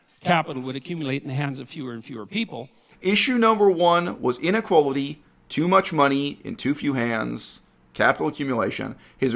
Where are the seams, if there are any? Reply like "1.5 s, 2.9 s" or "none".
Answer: 2.9 s